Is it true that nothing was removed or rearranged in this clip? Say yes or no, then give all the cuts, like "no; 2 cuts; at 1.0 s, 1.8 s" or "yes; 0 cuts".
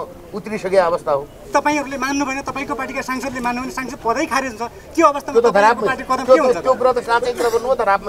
no; 1 cut; at 1.4 s